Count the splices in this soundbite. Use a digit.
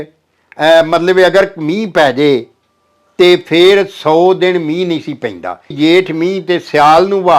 1